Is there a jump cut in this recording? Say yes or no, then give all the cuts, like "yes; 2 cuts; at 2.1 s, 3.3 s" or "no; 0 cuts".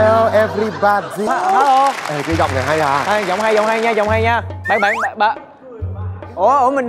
yes; 1 cut; at 1.3 s